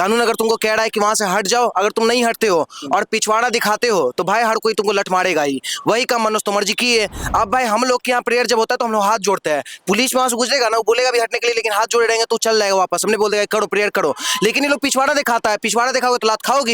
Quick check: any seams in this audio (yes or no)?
no